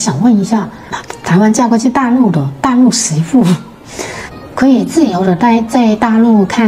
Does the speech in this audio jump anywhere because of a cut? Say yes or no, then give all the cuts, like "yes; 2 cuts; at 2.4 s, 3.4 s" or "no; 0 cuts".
no; 0 cuts